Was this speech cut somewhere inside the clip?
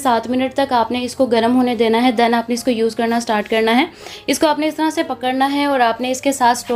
no; 0 cuts

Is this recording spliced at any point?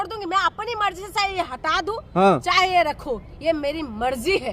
no; 0 cuts

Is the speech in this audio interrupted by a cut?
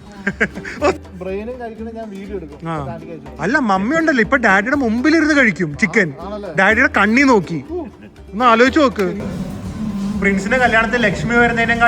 yes; 2 cuts; at 1.0 s, 9.2 s

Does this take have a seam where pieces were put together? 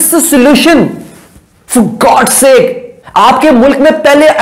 no; 0 cuts

